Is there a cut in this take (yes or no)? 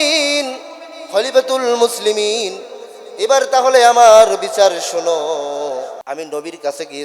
yes